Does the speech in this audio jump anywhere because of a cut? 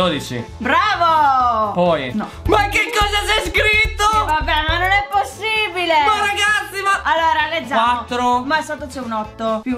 no; 0 cuts

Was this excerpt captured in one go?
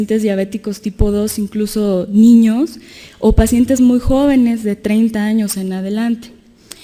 yes; 0 cuts

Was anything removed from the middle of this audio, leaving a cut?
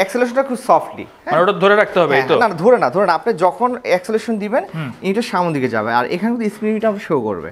no; 0 cuts

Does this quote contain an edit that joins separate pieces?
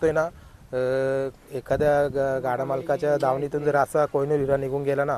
no; 0 cuts

